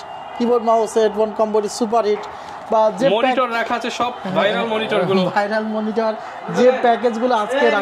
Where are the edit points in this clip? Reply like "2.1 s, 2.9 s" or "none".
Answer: none